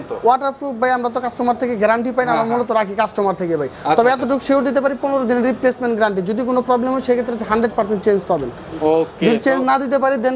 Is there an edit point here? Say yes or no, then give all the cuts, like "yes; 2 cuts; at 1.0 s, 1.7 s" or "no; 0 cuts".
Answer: no; 0 cuts